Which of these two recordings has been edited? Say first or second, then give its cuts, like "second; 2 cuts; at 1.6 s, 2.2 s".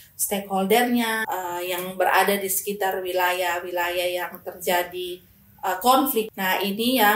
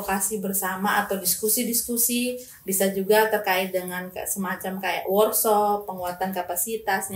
first; 2 cuts; at 1.2 s, 6.3 s